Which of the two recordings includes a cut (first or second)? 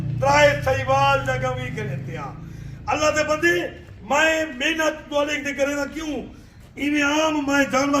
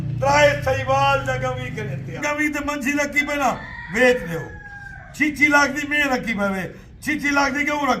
second